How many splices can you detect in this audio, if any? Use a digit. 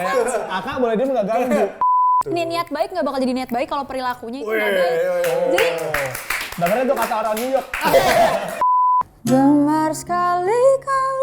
2